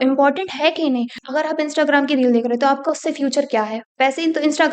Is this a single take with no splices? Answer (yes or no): no